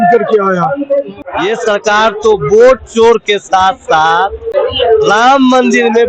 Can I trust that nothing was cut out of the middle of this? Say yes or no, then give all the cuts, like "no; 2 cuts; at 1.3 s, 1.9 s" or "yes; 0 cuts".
no; 2 cuts; at 1.2 s, 4.5 s